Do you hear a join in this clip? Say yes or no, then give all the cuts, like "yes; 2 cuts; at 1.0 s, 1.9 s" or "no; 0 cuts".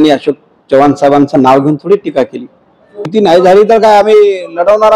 yes; 1 cut; at 3.1 s